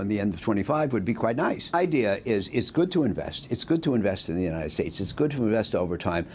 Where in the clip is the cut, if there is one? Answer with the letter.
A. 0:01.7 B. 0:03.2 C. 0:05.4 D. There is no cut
A